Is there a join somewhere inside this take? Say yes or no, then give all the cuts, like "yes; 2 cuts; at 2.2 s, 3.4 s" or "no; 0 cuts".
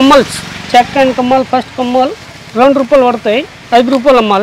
no; 0 cuts